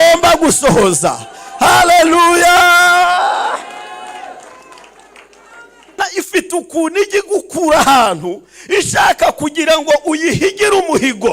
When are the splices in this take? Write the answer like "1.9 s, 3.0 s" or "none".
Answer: 6.0 s